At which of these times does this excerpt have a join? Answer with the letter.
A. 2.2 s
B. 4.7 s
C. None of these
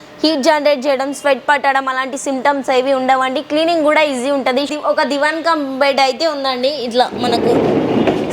B